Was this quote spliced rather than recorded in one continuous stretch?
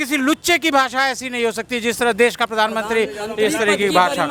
no; 0 cuts

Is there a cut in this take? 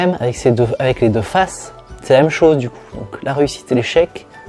no; 0 cuts

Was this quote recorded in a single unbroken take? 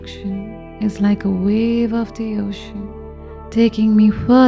yes; 0 cuts

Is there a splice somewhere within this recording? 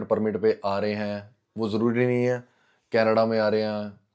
no; 0 cuts

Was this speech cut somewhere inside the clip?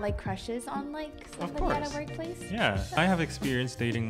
yes; 1 cut; at 3.0 s

